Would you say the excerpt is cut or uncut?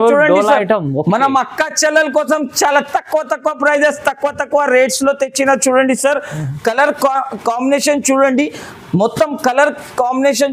uncut